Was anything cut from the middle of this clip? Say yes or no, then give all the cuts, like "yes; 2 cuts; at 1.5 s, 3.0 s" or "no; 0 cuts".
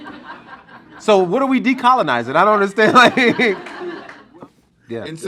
yes; 1 cut; at 4.2 s